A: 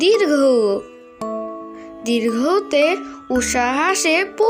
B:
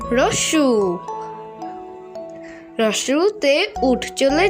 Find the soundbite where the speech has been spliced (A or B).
B